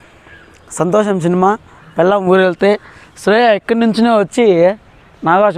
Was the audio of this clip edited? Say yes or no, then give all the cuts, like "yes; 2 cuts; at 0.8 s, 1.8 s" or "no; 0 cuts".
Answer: no; 0 cuts